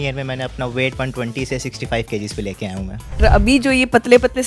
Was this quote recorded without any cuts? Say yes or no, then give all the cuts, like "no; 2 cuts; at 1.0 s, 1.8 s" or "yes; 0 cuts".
no; 1 cut; at 3.2 s